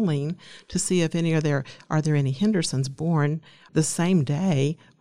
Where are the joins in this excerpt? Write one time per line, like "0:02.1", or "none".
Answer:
0:03.6

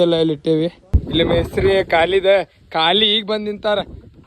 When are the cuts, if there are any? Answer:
0:00.9

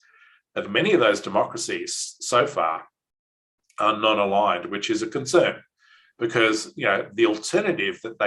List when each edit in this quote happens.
none

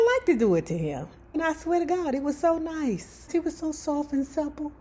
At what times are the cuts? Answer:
0:01.4
0:03.3

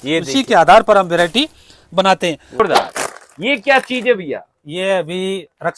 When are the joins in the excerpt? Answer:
0:02.4

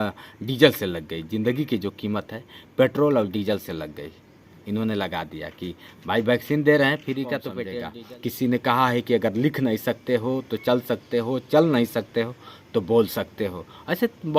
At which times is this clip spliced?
0:07.6

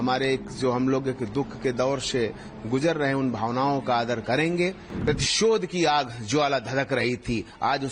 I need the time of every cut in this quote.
0:04.9

